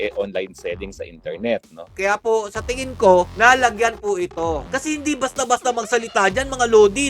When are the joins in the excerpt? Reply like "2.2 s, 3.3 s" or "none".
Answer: 1.9 s